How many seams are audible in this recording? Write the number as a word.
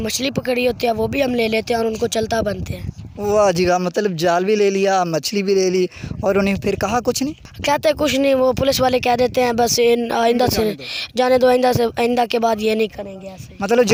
zero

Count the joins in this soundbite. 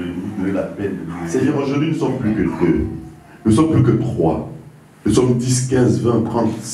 one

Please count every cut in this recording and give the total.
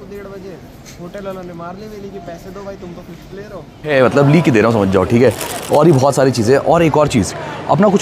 one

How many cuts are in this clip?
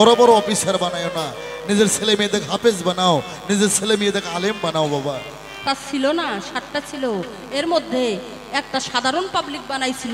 one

